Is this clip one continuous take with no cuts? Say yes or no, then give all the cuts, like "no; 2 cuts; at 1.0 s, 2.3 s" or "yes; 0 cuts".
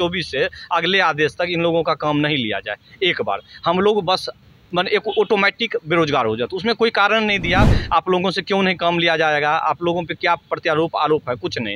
yes; 0 cuts